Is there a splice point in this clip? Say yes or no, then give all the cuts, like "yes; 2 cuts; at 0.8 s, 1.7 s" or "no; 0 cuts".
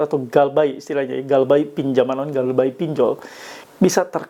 no; 0 cuts